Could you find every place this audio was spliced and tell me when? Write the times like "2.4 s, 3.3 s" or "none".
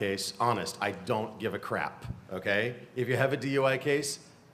1.6 s